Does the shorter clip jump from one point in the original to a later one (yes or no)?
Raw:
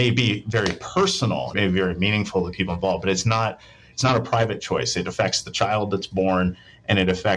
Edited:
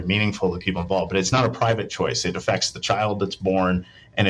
yes